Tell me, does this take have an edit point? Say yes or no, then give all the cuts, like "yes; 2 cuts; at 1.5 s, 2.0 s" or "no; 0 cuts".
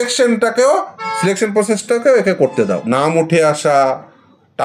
yes; 1 cut; at 2.8 s